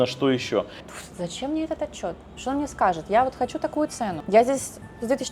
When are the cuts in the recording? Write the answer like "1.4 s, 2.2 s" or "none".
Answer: 0.9 s, 4.2 s